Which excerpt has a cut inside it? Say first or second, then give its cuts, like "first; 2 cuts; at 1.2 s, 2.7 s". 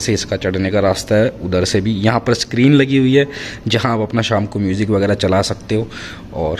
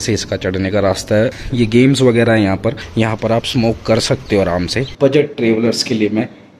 second; 3 cuts; at 1.4 s, 2.8 s, 4.8 s